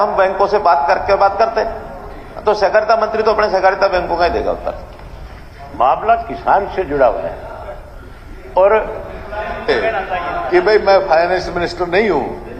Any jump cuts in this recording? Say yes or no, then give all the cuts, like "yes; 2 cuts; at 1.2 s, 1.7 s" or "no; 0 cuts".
no; 0 cuts